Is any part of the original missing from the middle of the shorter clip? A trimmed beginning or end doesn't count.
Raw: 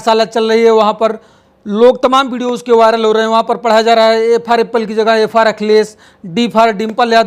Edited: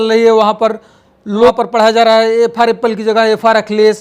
yes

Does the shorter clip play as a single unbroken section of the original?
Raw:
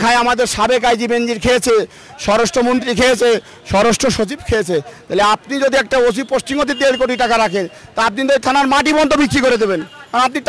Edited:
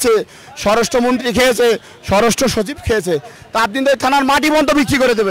no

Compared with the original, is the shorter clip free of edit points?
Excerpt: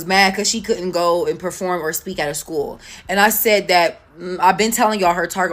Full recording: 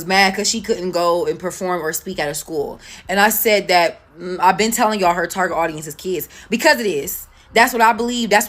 yes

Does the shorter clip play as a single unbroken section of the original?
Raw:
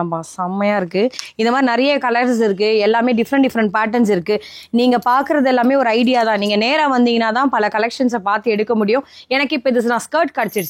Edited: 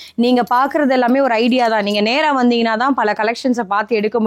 yes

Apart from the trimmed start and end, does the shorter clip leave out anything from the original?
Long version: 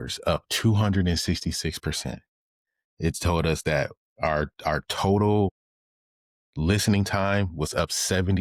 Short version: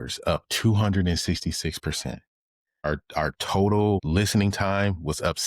yes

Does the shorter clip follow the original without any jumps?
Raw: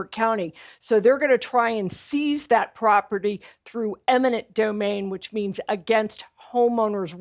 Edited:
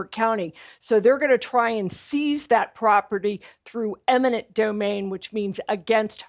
yes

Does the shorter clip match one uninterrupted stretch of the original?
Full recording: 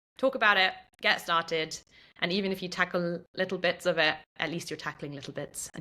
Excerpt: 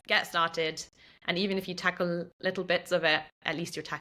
yes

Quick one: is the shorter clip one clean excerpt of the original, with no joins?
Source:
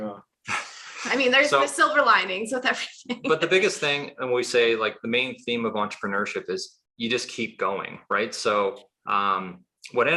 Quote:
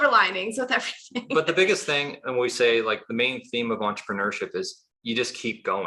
yes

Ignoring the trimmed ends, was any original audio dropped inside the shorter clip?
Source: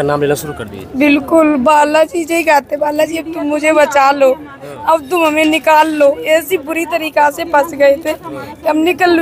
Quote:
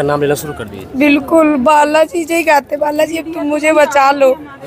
no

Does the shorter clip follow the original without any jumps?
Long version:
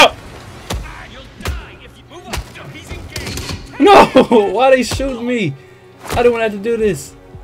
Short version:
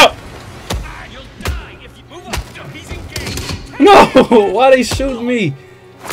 yes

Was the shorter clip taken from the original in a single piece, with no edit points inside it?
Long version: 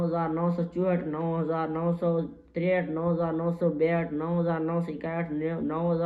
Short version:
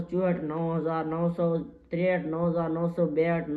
yes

